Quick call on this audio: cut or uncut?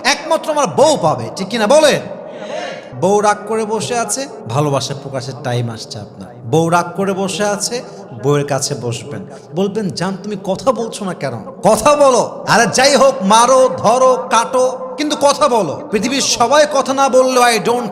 cut